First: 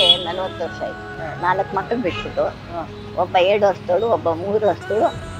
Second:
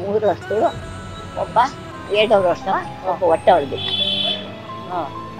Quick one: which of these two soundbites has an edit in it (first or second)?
first